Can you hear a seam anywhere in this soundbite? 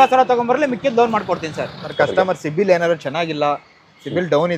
yes; 1 cut; at 1.8 s

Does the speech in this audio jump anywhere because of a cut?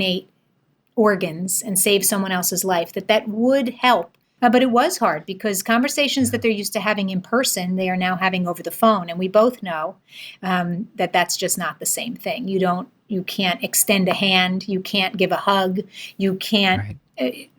yes; 1 cut; at 4.2 s

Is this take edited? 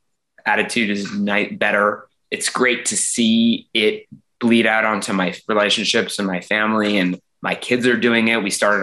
yes; 1 cut; at 2.2 s

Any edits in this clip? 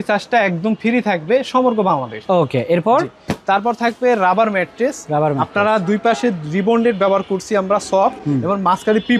no; 0 cuts

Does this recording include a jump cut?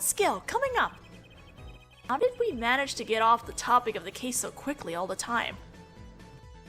yes; 1 cut; at 4.1 s

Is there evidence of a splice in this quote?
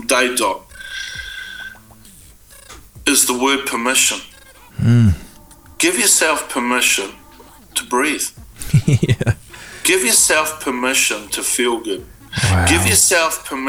no; 0 cuts

